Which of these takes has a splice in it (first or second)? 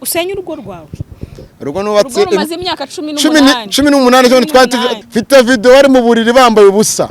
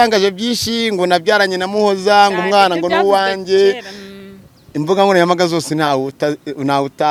first